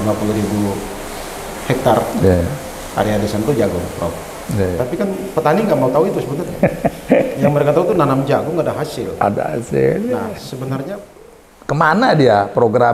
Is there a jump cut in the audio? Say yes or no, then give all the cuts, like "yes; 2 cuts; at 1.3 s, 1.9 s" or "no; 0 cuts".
yes; 2 cuts; at 4.7 s, 11.1 s